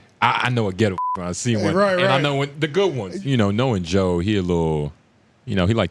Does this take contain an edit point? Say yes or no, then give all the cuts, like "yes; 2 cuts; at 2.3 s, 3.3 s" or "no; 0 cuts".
yes; 1 cut; at 3.1 s